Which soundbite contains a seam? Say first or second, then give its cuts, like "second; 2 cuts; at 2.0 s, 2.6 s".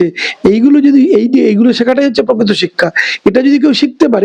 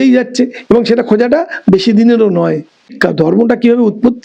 second; 1 cut; at 2.9 s